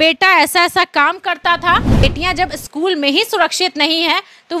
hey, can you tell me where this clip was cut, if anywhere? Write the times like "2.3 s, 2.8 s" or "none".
2.0 s

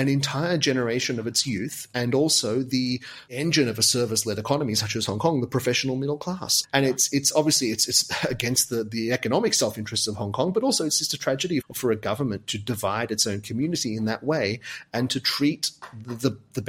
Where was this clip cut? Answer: 3.3 s, 11.7 s

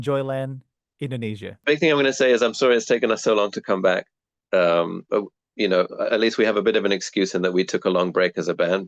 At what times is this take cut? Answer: 1.5 s

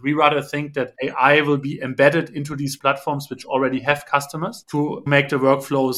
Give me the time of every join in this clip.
0.9 s, 2.8 s, 5.1 s

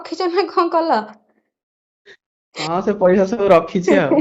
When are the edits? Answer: none

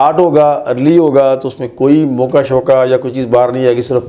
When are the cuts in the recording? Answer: none

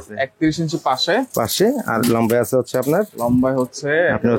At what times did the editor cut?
none

